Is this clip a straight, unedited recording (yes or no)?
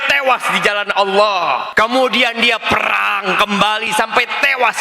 no